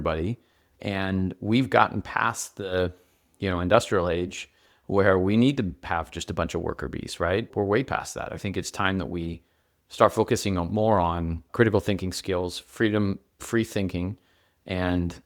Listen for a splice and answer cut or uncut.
cut